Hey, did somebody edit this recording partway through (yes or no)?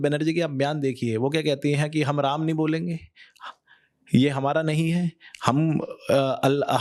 no